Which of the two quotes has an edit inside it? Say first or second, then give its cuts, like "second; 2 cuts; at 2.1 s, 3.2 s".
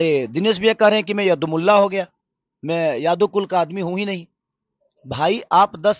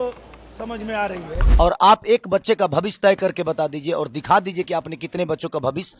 second; 1 cut; at 1.4 s